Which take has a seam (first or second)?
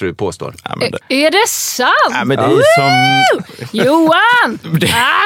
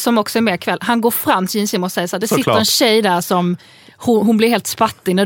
first